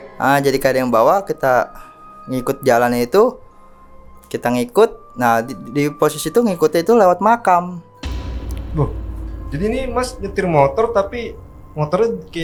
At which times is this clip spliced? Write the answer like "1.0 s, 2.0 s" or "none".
none